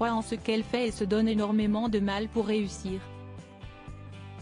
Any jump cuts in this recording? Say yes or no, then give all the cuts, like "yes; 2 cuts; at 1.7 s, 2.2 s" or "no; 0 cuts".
no; 0 cuts